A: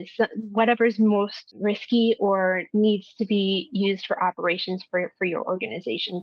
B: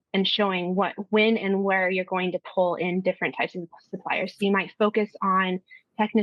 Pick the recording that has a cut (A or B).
A